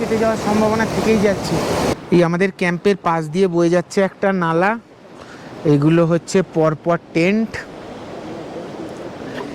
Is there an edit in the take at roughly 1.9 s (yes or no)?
yes